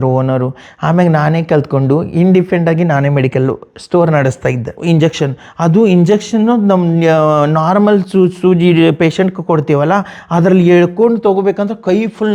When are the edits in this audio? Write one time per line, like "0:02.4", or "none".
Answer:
0:04.8